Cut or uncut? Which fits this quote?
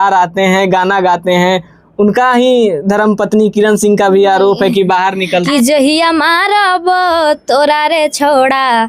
cut